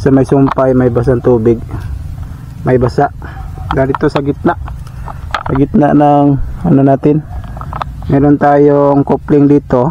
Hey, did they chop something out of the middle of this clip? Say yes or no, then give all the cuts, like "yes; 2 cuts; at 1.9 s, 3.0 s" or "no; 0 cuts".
no; 0 cuts